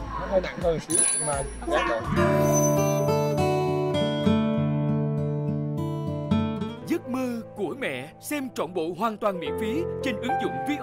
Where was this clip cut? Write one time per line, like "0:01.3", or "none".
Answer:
0:06.8